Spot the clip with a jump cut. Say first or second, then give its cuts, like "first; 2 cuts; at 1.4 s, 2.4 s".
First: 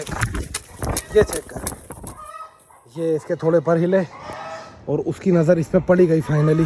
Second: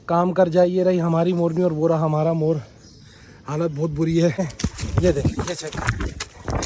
second; 1 cut; at 4.5 s